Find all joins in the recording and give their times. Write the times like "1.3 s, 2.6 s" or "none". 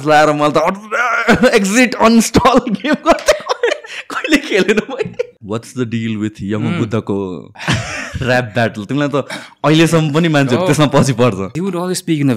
5.4 s, 7.5 s, 11.5 s